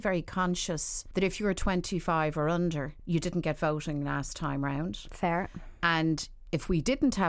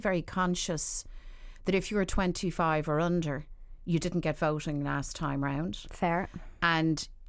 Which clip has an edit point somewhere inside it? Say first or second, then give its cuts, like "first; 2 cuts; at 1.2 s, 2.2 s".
first; 2 cuts; at 0.9 s, 2.9 s